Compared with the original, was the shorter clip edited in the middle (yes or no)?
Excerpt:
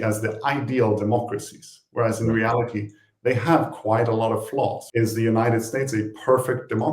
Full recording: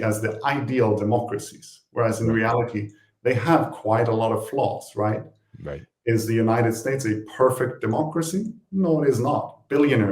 yes